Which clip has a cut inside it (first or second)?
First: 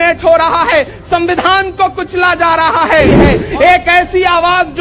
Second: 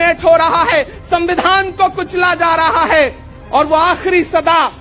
first